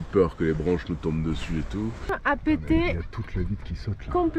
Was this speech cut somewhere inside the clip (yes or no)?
yes